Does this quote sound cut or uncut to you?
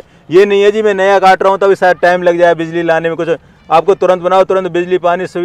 uncut